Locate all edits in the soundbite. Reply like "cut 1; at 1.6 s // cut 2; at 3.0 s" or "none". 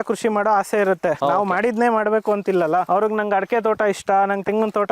cut 1; at 1.2 s // cut 2; at 2.9 s